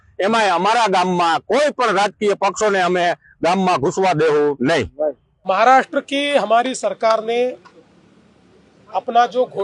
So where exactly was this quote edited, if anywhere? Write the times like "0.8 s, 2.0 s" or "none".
5.3 s